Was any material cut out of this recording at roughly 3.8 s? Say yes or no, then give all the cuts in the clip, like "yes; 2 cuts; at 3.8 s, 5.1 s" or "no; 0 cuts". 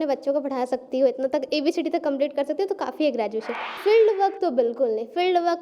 yes; 1 cut; at 3.8 s